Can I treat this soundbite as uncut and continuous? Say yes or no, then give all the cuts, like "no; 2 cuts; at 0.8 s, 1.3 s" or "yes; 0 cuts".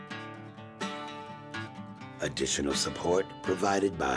yes; 0 cuts